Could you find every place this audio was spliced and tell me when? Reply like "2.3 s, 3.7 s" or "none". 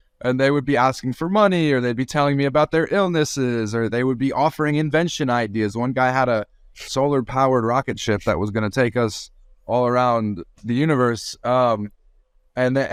none